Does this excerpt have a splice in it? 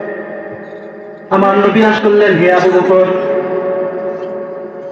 yes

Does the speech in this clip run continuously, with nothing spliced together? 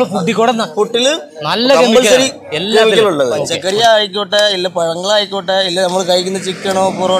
no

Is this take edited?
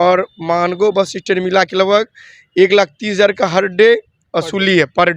no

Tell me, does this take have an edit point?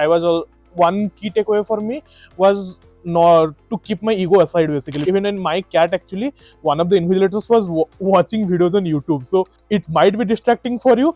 yes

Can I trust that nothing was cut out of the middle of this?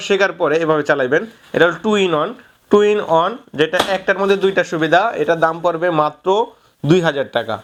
yes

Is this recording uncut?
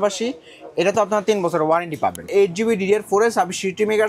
no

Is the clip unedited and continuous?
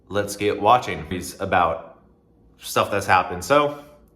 no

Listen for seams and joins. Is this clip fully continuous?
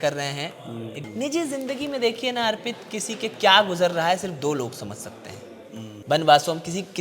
no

